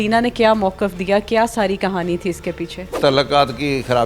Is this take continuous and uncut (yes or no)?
no